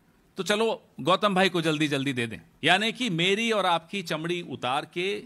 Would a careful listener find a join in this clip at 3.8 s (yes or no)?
no